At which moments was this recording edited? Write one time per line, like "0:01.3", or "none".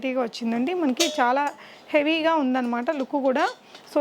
none